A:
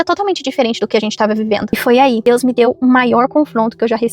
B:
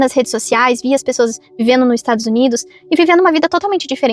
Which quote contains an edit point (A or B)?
A